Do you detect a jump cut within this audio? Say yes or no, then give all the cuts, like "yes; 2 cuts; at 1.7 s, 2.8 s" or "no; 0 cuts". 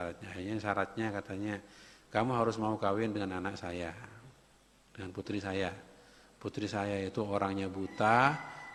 no; 0 cuts